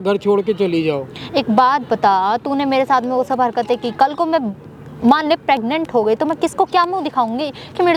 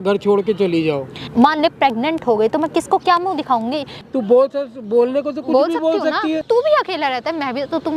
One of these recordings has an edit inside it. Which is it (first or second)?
second